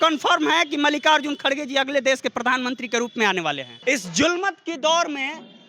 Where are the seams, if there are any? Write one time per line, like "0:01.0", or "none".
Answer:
0:03.7